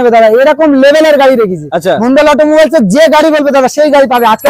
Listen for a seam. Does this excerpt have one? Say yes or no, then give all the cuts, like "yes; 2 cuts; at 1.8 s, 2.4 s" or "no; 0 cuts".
no; 0 cuts